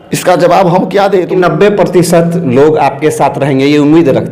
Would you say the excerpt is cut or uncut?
cut